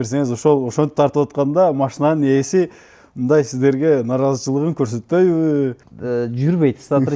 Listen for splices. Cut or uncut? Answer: cut